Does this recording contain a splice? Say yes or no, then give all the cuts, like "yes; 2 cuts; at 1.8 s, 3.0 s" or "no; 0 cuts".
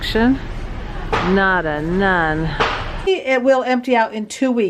yes; 1 cut; at 3.1 s